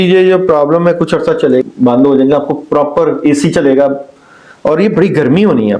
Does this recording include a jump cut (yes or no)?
yes